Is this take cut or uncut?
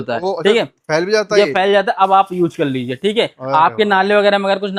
uncut